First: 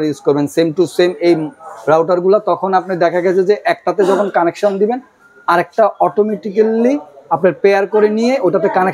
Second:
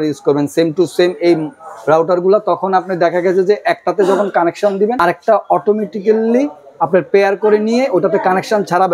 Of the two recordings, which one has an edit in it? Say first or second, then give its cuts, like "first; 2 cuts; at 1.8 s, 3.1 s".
second; 1 cut; at 5.0 s